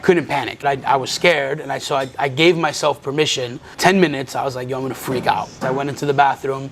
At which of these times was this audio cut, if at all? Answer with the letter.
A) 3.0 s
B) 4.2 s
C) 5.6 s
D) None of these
C